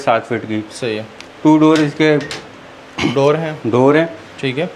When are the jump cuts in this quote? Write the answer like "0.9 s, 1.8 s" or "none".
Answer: none